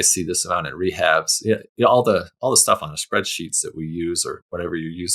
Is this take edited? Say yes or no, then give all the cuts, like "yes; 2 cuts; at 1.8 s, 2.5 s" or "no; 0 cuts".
no; 0 cuts